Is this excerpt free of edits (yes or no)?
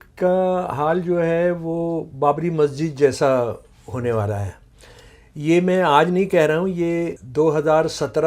no